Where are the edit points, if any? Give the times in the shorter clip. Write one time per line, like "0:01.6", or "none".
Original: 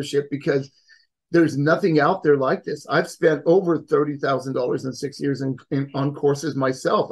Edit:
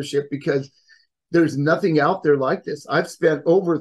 none